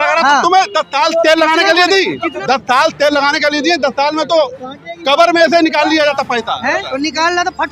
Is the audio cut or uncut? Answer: cut